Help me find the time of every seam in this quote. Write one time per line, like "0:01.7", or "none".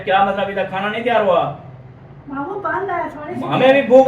none